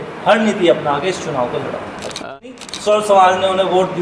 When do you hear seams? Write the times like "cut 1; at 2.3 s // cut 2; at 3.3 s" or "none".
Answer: cut 1; at 2.2 s